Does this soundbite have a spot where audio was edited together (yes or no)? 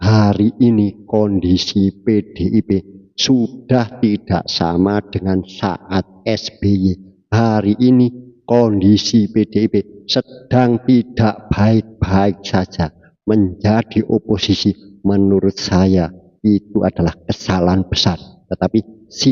no